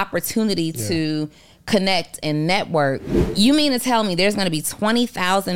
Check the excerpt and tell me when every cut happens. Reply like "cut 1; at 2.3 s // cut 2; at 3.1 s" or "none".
cut 1; at 3.2 s